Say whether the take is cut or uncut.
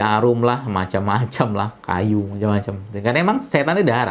uncut